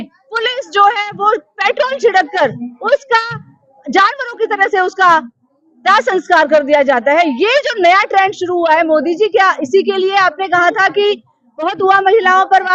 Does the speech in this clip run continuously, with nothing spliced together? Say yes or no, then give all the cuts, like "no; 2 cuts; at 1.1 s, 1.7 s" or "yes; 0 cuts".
yes; 0 cuts